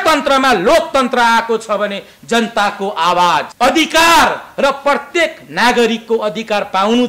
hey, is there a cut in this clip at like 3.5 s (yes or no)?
yes